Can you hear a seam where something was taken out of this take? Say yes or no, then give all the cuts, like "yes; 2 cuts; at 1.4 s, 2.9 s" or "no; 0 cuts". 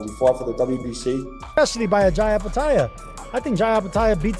yes; 1 cut; at 1.6 s